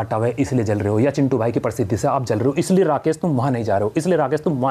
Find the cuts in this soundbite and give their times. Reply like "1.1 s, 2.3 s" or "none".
none